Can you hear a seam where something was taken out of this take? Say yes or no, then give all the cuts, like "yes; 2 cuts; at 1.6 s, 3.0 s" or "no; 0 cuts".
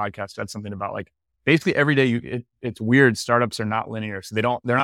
no; 0 cuts